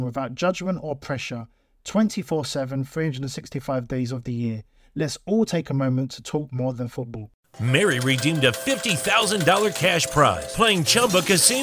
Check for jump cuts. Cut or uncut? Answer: cut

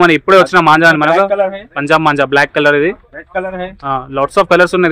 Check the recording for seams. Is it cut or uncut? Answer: uncut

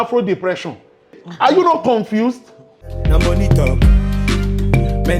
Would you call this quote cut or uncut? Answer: cut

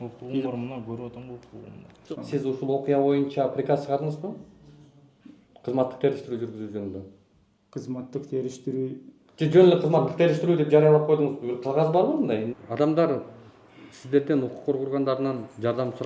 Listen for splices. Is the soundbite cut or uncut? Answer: cut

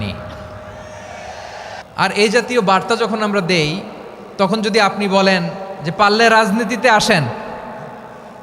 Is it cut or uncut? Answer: cut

